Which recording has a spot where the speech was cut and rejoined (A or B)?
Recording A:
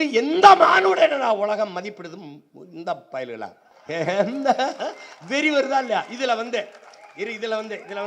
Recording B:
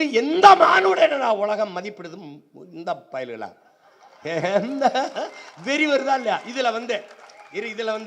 A